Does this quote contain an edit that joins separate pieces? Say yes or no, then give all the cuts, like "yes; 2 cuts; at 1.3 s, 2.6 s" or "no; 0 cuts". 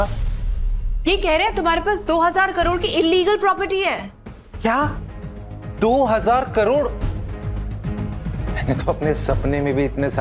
yes; 1 cut; at 8.4 s